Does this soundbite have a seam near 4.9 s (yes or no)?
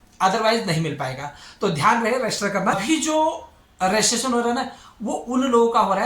no